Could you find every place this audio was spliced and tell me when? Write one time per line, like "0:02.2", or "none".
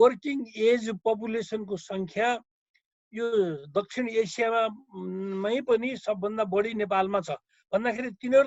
none